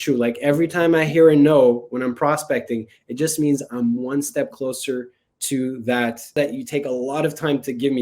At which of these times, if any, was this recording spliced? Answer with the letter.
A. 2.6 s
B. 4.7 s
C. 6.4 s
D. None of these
C